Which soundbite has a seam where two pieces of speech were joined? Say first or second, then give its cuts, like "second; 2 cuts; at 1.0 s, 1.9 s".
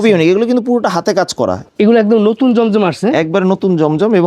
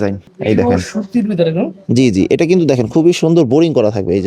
first; 1 cut; at 1.6 s